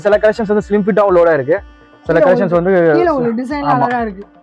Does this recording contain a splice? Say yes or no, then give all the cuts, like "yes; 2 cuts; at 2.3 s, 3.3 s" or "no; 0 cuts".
no; 0 cuts